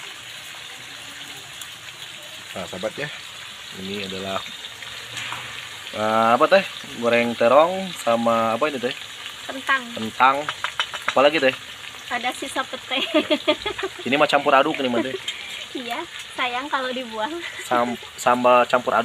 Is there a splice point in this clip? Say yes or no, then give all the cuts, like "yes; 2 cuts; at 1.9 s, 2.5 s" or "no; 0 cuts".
no; 0 cuts